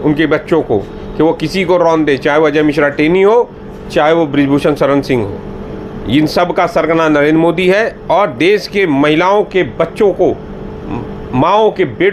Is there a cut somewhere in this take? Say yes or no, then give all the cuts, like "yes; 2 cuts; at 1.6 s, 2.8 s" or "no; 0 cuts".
no; 0 cuts